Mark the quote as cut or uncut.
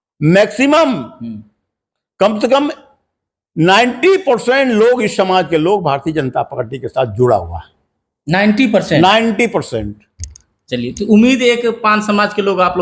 uncut